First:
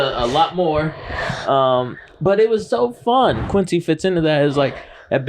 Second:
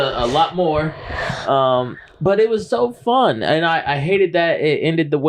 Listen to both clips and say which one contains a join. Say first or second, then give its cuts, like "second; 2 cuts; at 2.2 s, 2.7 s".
first; 1 cut; at 3.4 s